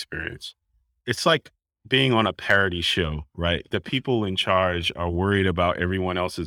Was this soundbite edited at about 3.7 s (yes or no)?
yes